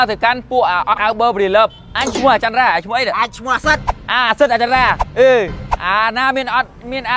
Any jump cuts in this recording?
yes; 2 cuts; at 0.9 s, 5.6 s

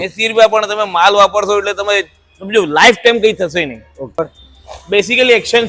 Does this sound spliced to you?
yes; 1 cut; at 4.2 s

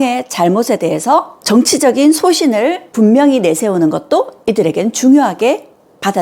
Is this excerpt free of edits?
yes; 0 cuts

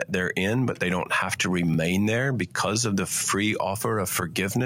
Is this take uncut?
yes; 0 cuts

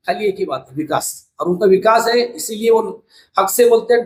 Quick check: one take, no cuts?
yes; 0 cuts

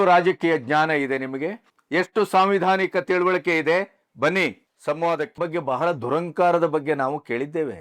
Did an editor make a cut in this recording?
yes; 1 cut; at 5.4 s

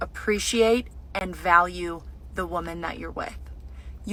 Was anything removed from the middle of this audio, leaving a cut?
no; 0 cuts

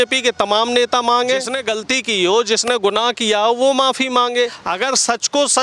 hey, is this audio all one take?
no; 2 cuts; at 1.5 s, 4.6 s

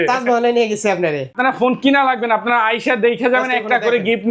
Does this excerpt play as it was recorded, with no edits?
no; 1 cut; at 1.3 s

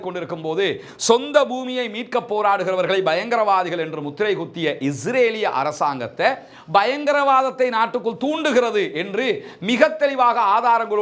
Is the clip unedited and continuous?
yes; 0 cuts

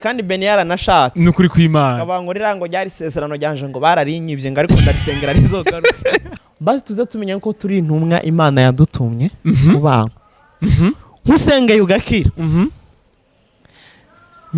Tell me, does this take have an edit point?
yes; 1 cut; at 6.3 s

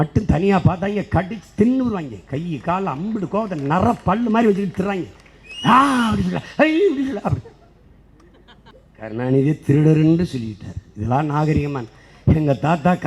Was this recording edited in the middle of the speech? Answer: yes; 1 cut; at 8.7 s

